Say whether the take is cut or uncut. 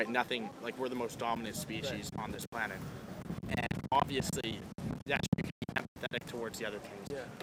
uncut